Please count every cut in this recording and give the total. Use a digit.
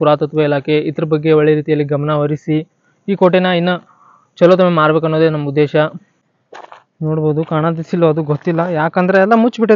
1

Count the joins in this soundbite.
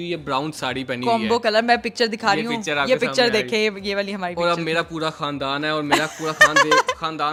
0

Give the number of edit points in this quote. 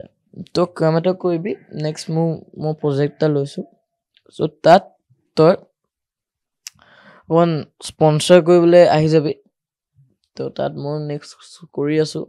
0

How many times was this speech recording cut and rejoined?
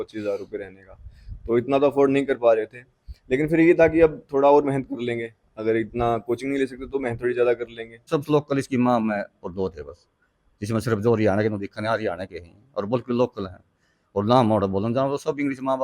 1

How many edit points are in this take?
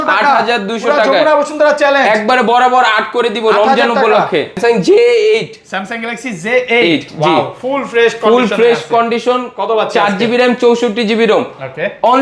1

